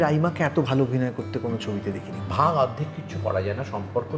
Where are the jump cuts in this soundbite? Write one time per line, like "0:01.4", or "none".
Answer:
0:02.1

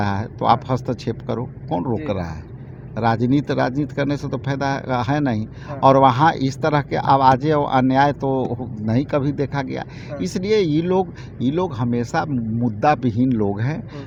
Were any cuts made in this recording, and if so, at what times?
none

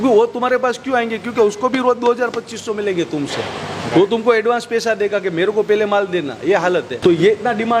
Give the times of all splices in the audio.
none

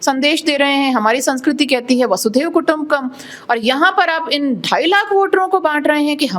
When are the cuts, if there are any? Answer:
none

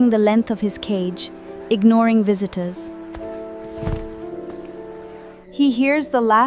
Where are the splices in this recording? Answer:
0:05.4

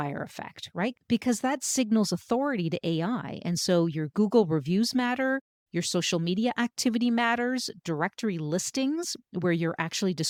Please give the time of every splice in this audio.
none

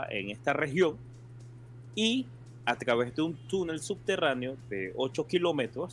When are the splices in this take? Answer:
none

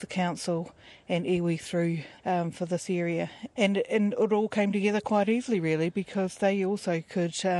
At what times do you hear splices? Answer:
0:02.1
0:03.4

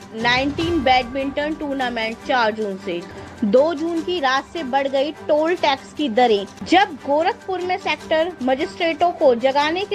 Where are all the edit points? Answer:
0:03.0
0:06.5

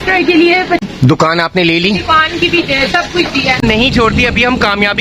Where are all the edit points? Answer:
0:00.8
0:03.6

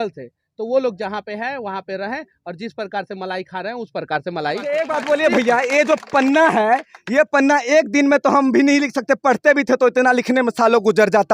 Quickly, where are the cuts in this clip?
0:04.7

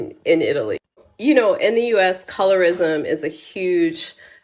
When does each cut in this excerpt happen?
0:01.1

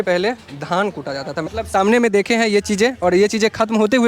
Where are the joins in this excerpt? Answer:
0:01.5

